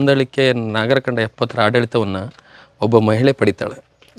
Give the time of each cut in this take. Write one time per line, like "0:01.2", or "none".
none